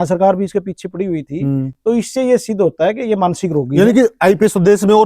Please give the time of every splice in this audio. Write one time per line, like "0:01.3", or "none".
none